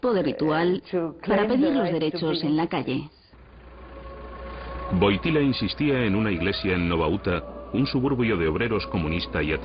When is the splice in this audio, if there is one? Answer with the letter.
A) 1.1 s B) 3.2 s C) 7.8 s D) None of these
A